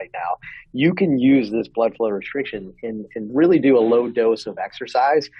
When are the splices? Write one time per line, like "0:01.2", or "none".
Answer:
none